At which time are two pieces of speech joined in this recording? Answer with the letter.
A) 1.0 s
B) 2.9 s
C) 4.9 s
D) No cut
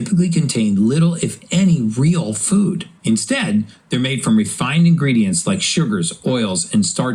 D